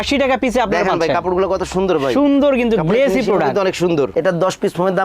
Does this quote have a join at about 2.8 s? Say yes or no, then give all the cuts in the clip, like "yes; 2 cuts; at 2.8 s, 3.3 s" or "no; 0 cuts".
no; 1 cut; at 4.1 s